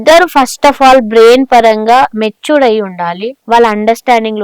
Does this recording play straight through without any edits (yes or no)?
no